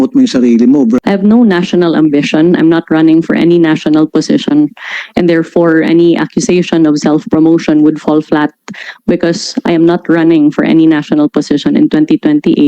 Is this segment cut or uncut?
cut